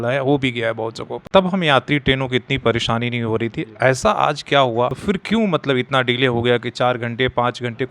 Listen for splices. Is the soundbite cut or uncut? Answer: cut